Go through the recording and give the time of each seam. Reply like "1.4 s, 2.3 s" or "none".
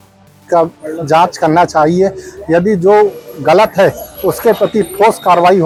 none